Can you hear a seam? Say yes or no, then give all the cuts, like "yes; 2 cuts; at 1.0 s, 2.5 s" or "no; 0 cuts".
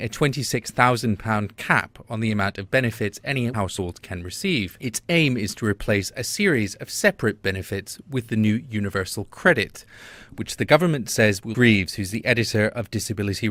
no; 0 cuts